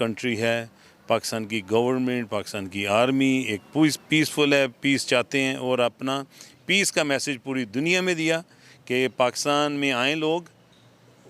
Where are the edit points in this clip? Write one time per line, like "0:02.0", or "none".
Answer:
none